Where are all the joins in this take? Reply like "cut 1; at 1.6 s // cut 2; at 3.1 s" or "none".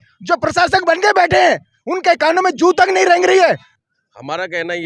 cut 1; at 3.7 s